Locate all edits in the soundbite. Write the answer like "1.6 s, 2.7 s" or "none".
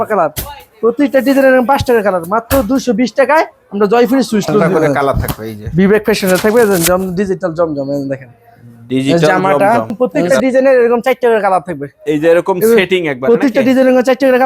4.7 s, 9.9 s